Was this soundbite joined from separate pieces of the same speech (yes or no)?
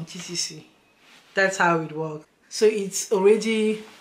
yes